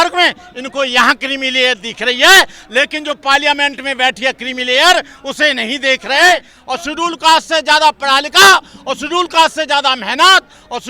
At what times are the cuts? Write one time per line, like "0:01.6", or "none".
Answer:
0:06.5